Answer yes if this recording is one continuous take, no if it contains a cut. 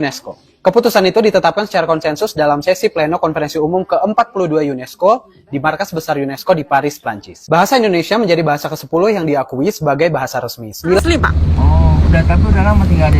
no